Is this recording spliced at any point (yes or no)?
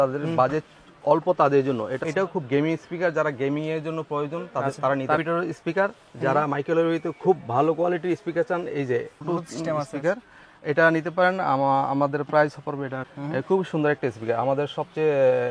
yes